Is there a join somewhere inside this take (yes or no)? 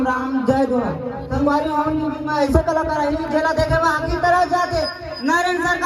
no